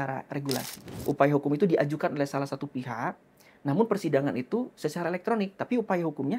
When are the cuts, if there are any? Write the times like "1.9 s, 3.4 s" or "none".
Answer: 0.9 s

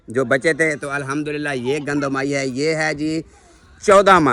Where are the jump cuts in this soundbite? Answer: none

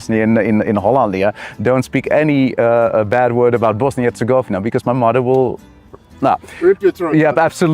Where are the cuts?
none

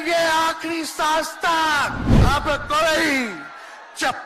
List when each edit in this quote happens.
2.1 s

